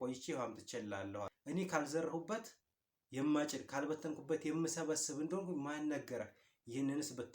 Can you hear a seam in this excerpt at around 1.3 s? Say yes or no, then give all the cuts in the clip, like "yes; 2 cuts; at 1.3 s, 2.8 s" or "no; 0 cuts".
yes; 1 cut; at 1.3 s